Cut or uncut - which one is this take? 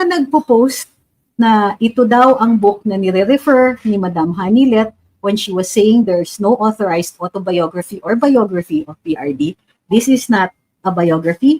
uncut